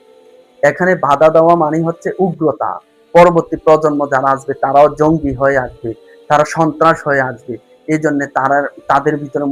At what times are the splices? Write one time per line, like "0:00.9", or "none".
none